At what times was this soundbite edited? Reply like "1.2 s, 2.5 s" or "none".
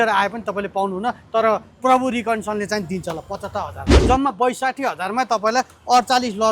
3.9 s